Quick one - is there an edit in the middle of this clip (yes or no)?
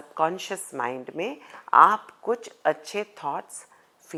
no